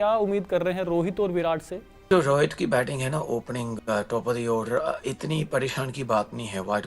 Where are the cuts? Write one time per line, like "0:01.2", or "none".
0:02.1